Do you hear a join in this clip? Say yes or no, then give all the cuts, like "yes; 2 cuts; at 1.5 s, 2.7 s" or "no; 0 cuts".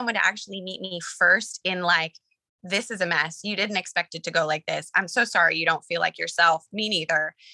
no; 0 cuts